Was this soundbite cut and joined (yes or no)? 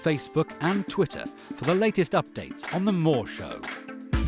yes